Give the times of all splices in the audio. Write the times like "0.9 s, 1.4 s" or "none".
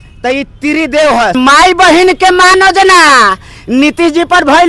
1.4 s